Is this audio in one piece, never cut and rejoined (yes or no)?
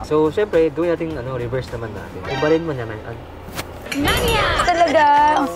no